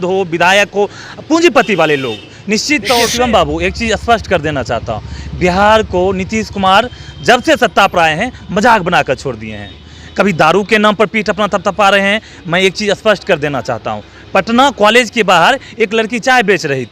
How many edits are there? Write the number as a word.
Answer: two